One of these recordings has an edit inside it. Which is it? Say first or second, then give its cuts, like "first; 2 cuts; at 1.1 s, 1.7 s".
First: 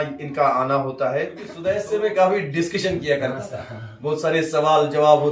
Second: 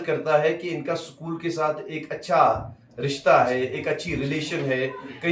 first; 1 cut; at 1.5 s